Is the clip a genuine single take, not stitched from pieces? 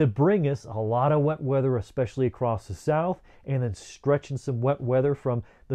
yes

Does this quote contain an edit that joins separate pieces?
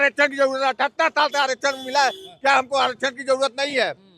no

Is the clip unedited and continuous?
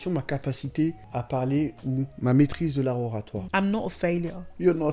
no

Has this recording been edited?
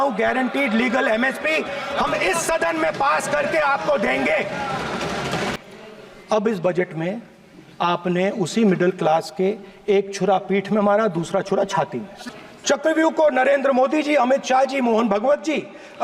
yes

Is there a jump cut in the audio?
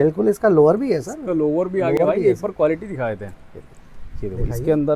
no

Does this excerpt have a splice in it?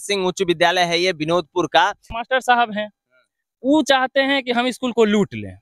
yes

